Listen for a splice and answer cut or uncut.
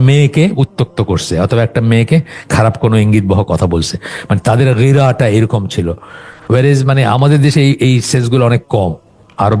uncut